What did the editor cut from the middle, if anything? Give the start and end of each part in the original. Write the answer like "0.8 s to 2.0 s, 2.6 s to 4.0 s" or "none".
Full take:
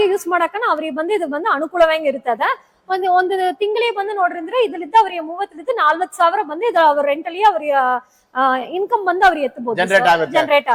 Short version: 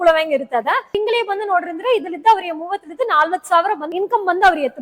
2.6 s to 3.6 s, 6.5 s to 8.7 s